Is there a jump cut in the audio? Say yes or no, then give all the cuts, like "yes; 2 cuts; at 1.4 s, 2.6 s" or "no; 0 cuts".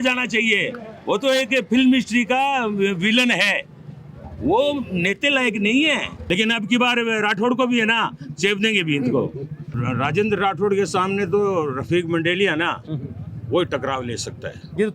yes; 2 cuts; at 6.2 s, 9.8 s